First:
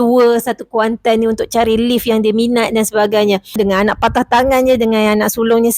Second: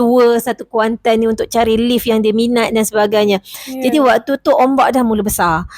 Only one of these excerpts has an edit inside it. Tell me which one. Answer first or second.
first